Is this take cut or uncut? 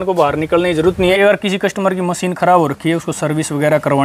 cut